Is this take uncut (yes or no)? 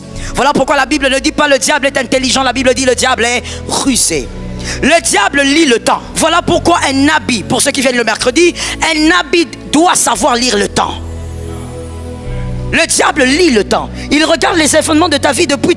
no